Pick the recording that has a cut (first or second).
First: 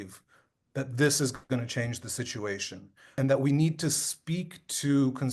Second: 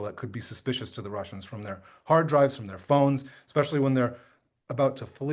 first